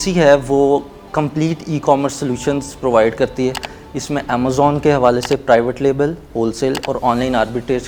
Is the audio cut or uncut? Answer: uncut